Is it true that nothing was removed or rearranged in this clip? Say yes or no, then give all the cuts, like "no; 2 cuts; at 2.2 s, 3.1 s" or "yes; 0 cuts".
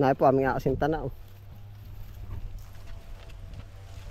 yes; 0 cuts